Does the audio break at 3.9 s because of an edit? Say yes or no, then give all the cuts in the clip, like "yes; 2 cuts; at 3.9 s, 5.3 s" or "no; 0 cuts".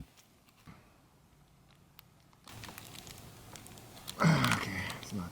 no; 2 cuts; at 0.7 s, 2.5 s